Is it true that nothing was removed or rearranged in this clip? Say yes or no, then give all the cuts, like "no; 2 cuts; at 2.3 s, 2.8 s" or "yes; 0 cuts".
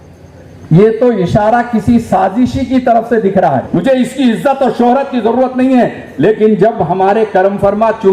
no; 1 cut; at 3.7 s